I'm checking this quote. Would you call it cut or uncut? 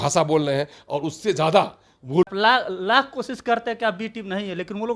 cut